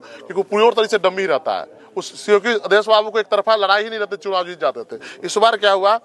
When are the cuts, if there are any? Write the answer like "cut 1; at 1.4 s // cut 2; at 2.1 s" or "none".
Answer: none